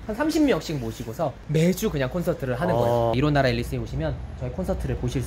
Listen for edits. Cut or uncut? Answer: uncut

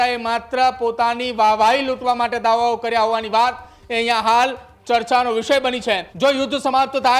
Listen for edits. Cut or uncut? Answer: cut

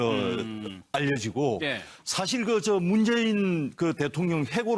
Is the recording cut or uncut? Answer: cut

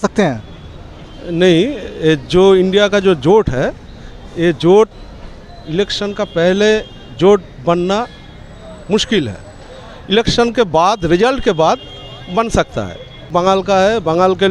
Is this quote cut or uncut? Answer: cut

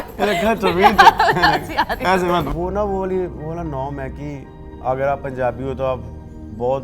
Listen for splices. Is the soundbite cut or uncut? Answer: cut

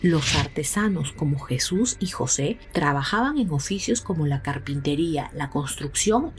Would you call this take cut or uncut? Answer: uncut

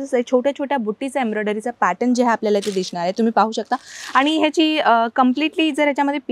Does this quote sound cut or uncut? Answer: uncut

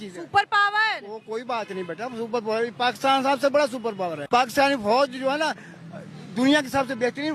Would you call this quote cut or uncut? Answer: uncut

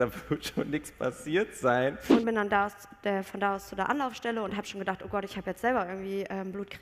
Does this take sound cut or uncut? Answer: cut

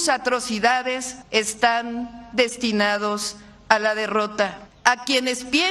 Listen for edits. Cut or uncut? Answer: cut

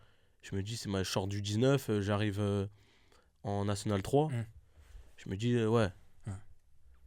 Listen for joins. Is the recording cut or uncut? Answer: uncut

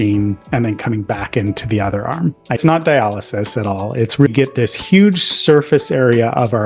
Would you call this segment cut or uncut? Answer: cut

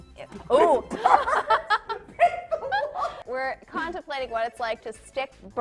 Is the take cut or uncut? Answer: cut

